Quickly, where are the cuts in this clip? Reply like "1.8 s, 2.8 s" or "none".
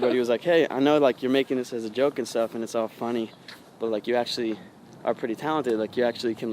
none

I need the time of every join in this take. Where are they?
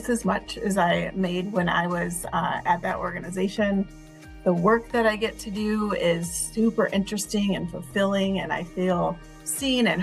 none

